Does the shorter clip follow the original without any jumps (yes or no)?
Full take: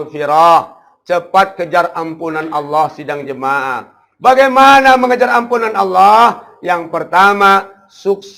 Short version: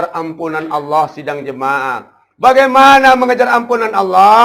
yes